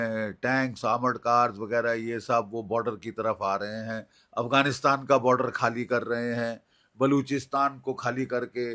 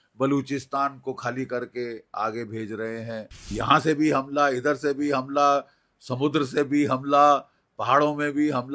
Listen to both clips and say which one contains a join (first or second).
second